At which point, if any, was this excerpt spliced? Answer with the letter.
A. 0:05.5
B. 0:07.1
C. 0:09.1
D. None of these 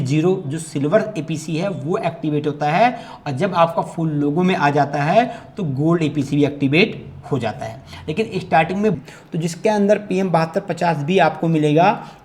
C